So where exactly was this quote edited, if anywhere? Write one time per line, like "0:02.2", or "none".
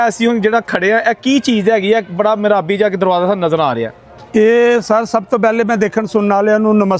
none